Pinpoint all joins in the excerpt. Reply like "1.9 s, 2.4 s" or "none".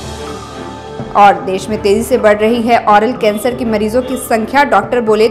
none